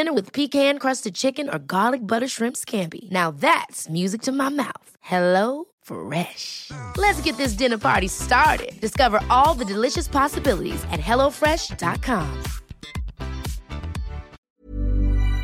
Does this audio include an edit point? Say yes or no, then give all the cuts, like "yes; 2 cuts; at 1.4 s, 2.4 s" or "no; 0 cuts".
yes; 1 cut; at 14.4 s